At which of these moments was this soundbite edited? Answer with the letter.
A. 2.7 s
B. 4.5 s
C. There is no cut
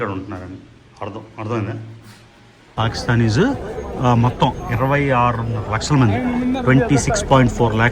A